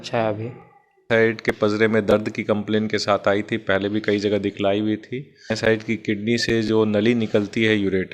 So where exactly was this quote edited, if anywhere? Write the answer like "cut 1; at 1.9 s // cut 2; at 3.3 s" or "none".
cut 1; at 0.9 s // cut 2; at 5.5 s

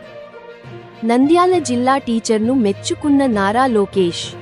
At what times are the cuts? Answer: cut 1; at 0.9 s

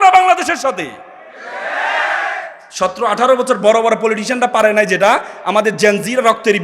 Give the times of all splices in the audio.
cut 1; at 2.6 s

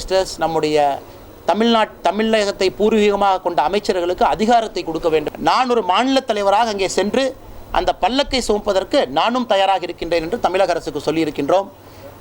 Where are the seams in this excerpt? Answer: cut 1; at 5.3 s

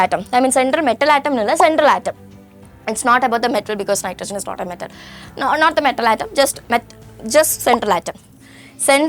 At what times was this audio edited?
none

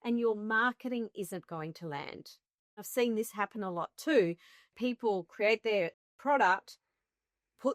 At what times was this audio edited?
cut 1; at 4.8 s

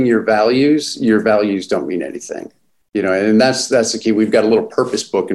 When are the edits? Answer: none

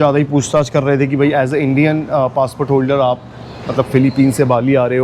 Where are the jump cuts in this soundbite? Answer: none

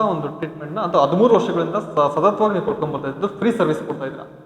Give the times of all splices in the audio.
none

